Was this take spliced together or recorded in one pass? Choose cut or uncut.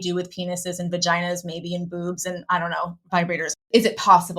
cut